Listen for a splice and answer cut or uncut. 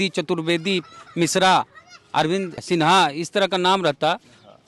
uncut